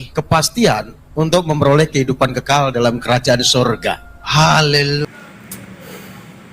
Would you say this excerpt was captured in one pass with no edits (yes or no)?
no